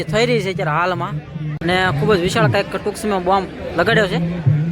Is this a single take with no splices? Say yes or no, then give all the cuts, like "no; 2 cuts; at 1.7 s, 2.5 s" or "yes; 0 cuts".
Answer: no; 1 cut; at 1.6 s